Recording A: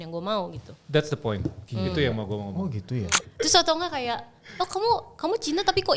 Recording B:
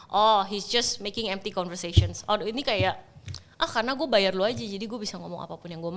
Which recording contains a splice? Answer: A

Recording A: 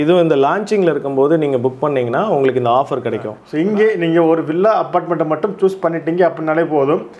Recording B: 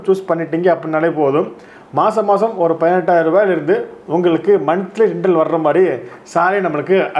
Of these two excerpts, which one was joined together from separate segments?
A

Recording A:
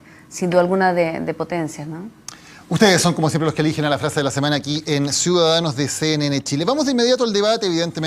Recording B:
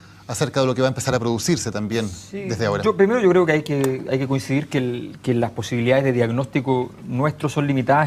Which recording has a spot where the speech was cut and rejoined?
A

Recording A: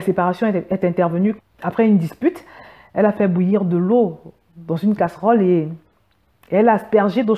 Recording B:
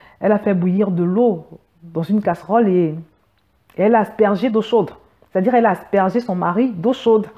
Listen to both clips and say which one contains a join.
A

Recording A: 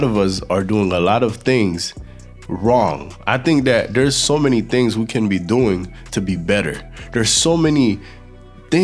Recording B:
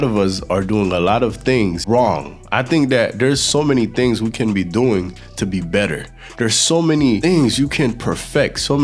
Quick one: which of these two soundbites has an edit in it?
B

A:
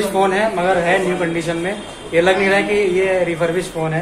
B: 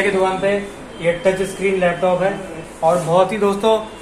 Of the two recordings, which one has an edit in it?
B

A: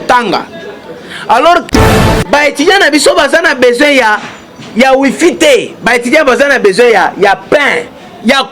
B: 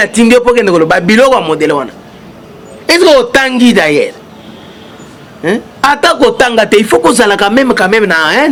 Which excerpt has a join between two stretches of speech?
A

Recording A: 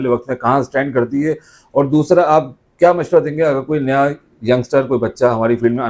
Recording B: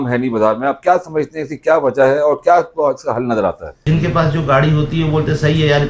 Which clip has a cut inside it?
B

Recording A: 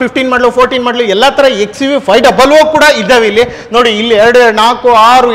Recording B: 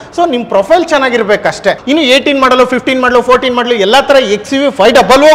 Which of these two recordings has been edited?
B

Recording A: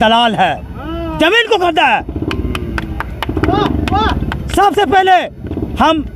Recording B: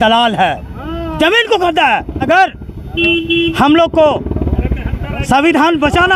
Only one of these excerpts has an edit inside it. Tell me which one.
B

